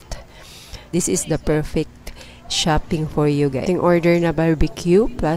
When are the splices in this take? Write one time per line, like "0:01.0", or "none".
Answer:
0:03.6